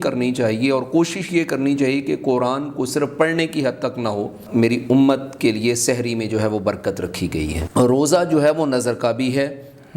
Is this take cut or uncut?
cut